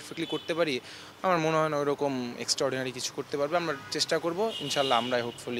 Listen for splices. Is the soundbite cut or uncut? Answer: uncut